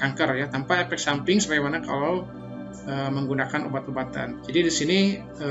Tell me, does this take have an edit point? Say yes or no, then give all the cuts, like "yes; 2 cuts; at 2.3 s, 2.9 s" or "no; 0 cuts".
no; 0 cuts